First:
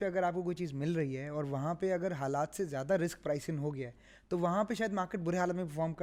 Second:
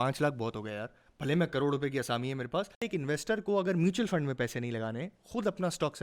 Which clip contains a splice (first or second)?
second